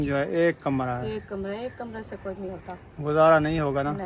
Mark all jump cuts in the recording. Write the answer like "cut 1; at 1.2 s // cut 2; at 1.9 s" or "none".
none